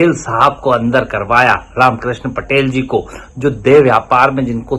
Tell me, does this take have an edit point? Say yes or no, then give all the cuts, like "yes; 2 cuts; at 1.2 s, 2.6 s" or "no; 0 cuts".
no; 0 cuts